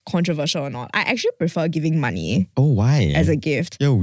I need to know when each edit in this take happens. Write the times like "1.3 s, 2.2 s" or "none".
2.5 s

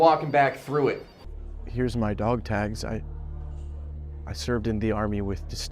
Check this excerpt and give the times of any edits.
1.2 s

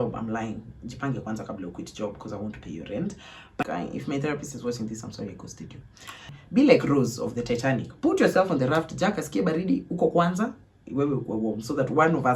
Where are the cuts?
3.6 s, 6.3 s

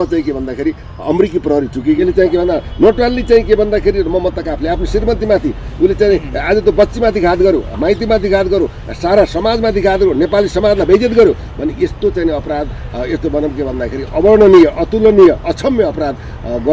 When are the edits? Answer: 2.0 s

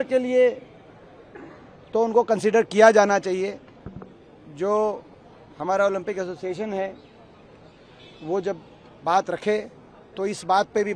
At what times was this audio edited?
none

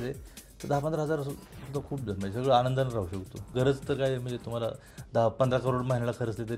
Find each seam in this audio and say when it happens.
3.4 s

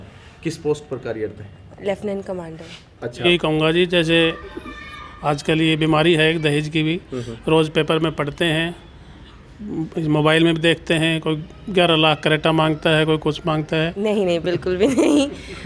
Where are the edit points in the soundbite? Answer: 3.2 s, 13.9 s

